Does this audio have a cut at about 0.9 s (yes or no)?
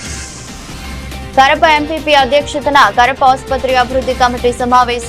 yes